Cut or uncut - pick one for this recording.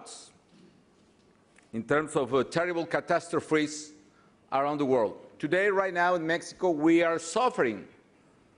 cut